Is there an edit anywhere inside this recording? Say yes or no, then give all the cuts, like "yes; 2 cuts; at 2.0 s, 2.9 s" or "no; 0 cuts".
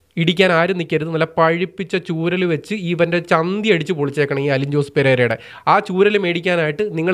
no; 0 cuts